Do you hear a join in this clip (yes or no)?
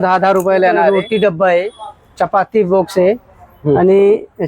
yes